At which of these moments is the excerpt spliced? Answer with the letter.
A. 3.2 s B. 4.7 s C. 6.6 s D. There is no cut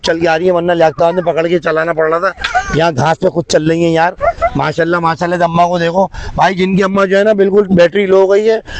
D